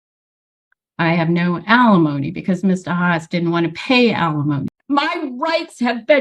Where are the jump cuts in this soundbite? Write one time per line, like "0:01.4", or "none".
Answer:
0:04.7